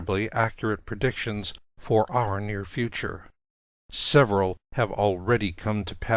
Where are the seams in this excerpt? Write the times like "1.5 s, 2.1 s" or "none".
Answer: 1.8 s